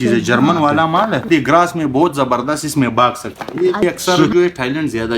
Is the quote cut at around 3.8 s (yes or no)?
yes